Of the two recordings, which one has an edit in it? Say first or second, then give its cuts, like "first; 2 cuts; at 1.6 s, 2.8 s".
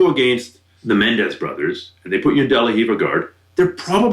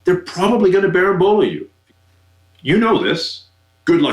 second; 1 cut; at 1.8 s